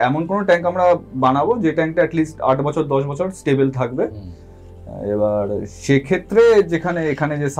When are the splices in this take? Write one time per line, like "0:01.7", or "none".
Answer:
none